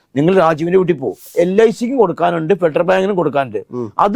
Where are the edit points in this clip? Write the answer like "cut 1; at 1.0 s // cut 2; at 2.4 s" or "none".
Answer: cut 1; at 1.3 s